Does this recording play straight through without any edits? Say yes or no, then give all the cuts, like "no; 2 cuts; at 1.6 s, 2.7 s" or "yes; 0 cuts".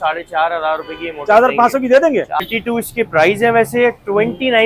no; 1 cut; at 2.4 s